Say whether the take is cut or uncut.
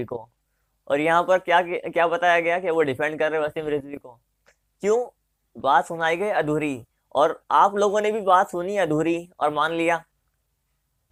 uncut